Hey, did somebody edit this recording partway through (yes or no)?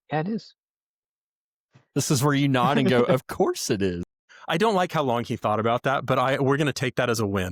no